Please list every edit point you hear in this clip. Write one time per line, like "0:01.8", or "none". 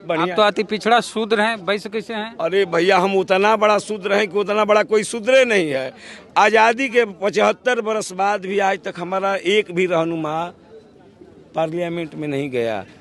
none